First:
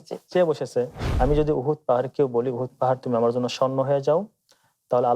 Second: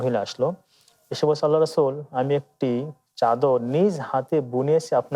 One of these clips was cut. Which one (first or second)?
first